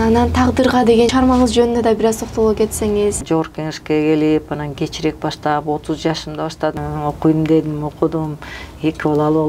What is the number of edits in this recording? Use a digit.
3